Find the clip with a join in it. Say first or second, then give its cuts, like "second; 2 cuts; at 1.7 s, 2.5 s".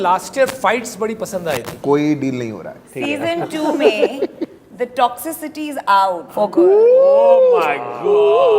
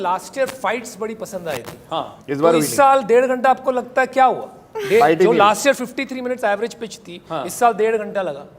first; 3 cuts; at 1.7 s, 3.0 s, 6.3 s